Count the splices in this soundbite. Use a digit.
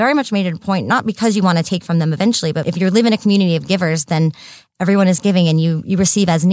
1